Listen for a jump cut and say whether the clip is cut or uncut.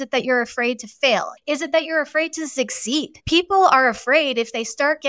cut